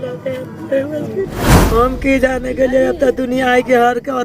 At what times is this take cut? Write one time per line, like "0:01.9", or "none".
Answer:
0:01.6